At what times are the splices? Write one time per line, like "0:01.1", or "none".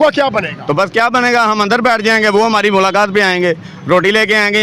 none